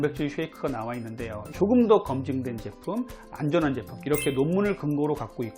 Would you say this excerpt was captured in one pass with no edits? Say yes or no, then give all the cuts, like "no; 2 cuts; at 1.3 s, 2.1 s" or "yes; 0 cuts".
no; 1 cut; at 1.4 s